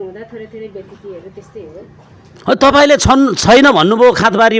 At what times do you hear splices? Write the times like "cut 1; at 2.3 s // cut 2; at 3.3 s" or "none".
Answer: none